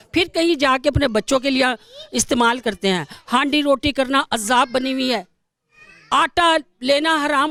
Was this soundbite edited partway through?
no; 0 cuts

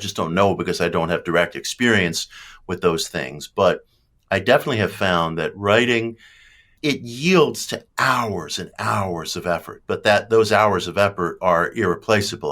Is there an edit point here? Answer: yes; 1 cut; at 6.7 s

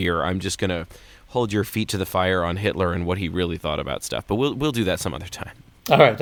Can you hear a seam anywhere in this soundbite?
no; 0 cuts

